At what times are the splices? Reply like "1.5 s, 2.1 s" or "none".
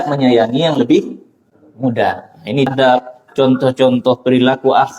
2.7 s